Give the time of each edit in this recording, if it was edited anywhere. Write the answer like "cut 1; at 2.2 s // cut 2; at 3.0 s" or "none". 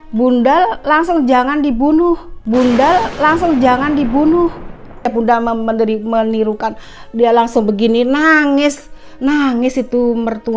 cut 1; at 5.1 s

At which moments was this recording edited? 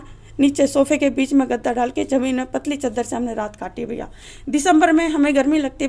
none

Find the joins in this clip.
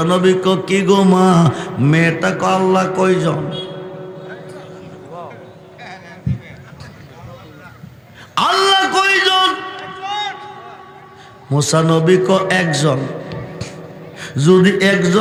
none

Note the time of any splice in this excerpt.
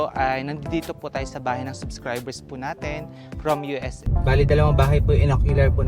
cut 1; at 4.0 s

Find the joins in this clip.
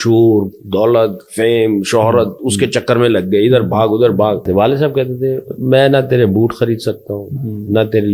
cut 1; at 4.5 s

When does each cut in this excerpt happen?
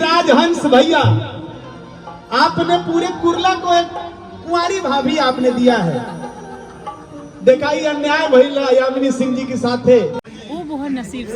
cut 1; at 10.3 s

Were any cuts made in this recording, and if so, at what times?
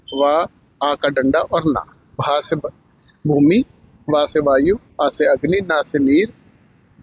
none

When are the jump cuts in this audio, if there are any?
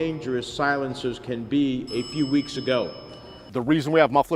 cut 1; at 3.4 s

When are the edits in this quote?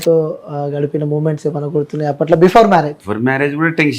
cut 1; at 3.0 s

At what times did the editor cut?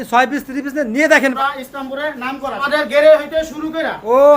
cut 1; at 1.3 s // cut 2; at 2.6 s

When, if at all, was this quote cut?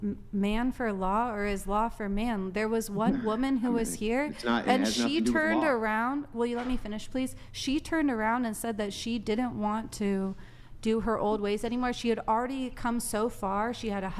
none

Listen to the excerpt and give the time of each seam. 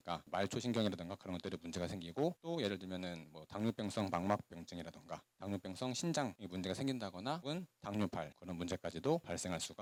none

